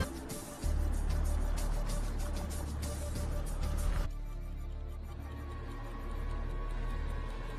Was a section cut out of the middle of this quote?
yes; 1 cut; at 4.1 s

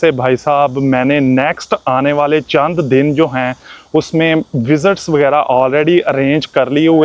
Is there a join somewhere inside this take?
no; 0 cuts

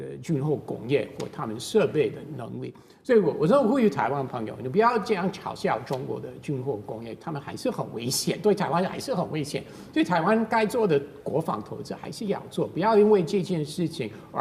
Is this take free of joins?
yes; 0 cuts

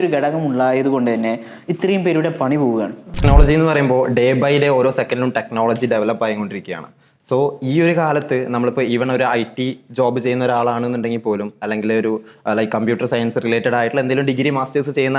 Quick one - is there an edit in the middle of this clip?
yes; 1 cut; at 3.2 s

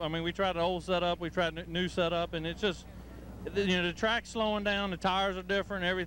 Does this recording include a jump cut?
no; 0 cuts

